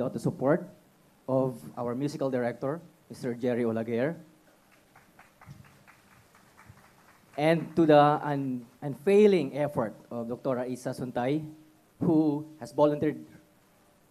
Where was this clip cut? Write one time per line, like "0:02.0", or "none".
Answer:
none

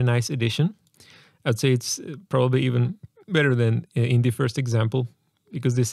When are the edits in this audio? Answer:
none

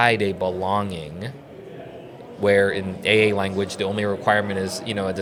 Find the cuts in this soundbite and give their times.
none

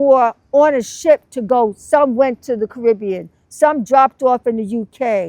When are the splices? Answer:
none

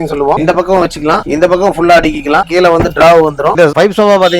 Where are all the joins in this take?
0:02.4
0:03.6

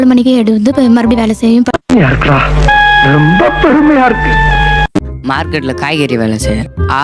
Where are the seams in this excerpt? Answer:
none

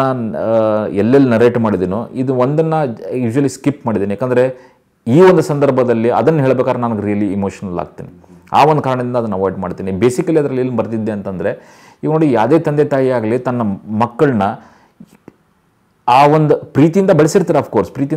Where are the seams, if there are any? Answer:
none

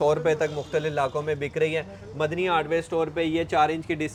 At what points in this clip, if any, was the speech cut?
none

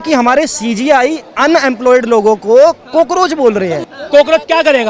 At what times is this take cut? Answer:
0:03.8

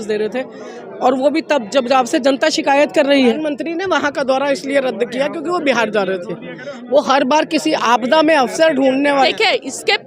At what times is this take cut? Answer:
0:03.4
0:09.3

